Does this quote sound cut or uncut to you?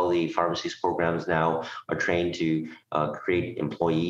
uncut